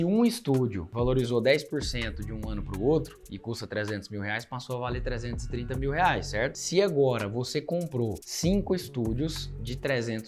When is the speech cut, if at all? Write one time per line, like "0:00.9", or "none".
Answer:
none